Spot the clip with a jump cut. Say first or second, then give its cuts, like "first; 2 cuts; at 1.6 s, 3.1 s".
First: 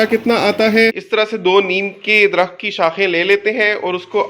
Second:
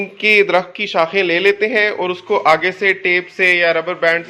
first; 1 cut; at 0.9 s